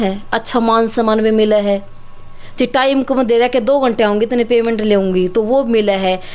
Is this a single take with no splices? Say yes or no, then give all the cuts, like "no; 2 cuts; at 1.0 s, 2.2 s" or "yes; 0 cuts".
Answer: yes; 0 cuts